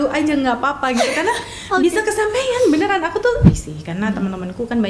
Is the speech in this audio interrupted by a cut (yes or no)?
yes